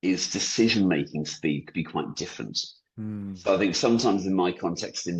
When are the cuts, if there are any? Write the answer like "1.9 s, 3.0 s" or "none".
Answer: none

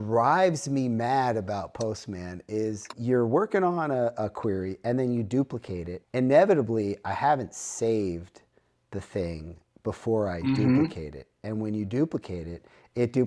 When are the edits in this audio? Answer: 3.0 s, 5.9 s

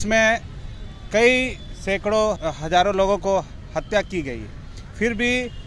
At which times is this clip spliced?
2.4 s

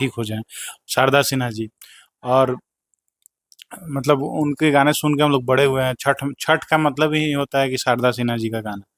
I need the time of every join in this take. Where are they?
none

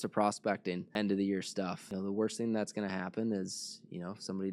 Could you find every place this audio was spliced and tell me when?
0.8 s, 1.8 s

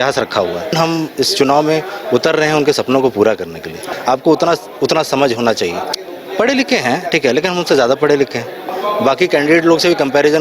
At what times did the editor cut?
0.7 s, 3.9 s, 6.0 s, 8.8 s

